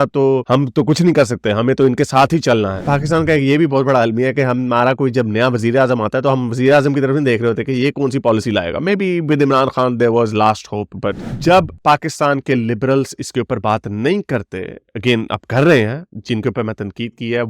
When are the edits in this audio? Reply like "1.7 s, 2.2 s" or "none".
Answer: 2.8 s, 11.2 s